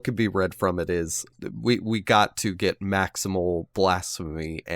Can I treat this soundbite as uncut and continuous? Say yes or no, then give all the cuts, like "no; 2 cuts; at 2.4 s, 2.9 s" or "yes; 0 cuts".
no; 1 cut; at 1.2 s